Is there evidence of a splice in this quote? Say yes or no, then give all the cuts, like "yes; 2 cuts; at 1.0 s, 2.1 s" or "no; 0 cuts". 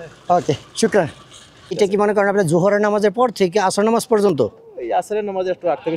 yes; 1 cut; at 1.8 s